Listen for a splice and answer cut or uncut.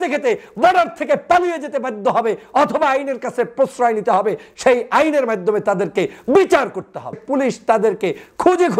cut